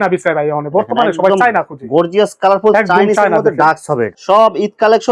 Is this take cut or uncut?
cut